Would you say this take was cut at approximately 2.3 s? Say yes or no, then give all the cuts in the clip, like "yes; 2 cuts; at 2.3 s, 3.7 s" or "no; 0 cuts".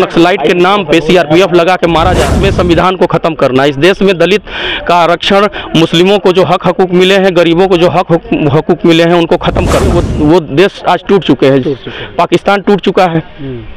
yes; 2 cuts; at 2.3 s, 10.0 s